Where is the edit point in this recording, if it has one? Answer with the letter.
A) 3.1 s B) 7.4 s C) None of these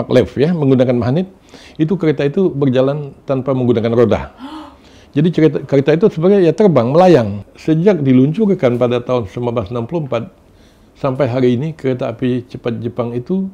B